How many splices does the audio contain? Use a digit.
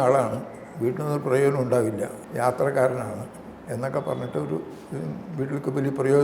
1